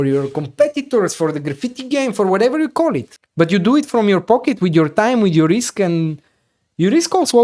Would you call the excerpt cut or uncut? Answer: cut